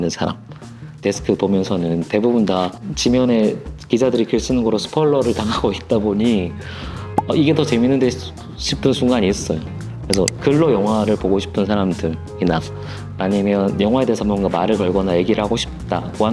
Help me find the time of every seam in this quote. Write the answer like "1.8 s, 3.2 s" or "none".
1.0 s